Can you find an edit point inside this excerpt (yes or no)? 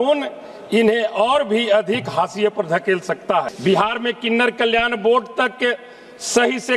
yes